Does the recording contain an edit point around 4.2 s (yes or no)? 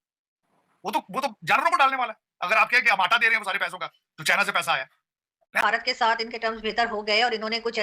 no